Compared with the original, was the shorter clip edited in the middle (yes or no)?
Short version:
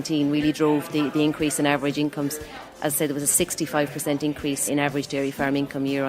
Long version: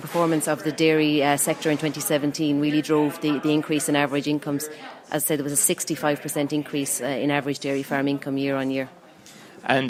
yes